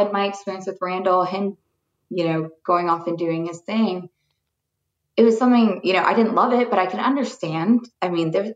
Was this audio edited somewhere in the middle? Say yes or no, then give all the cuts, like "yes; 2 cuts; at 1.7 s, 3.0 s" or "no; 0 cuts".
no; 0 cuts